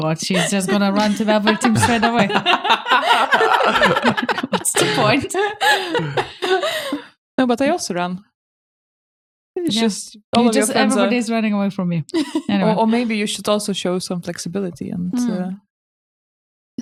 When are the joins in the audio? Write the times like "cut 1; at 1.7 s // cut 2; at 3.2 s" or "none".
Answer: none